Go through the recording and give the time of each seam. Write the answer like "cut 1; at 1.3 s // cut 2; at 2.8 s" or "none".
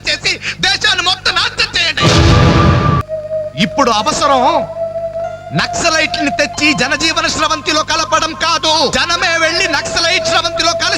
cut 1; at 3.0 s // cut 2; at 8.9 s